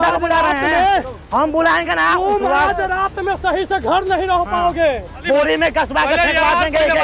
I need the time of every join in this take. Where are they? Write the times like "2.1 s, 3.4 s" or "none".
5.2 s